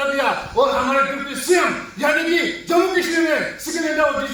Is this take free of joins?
yes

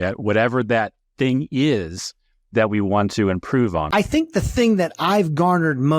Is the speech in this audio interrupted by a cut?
yes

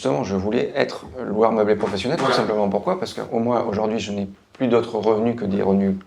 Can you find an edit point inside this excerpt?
no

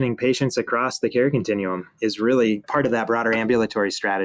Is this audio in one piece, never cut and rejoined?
yes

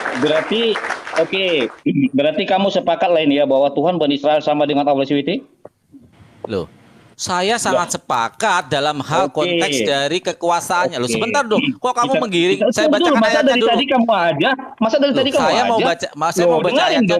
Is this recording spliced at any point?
no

